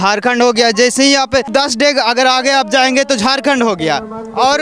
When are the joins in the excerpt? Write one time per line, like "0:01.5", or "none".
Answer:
0:01.5